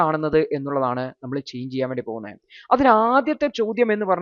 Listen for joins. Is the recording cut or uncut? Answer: uncut